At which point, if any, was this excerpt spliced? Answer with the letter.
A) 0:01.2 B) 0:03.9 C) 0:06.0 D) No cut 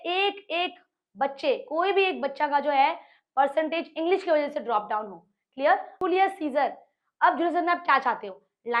C